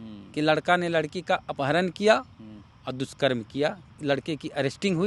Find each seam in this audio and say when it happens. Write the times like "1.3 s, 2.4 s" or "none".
3.9 s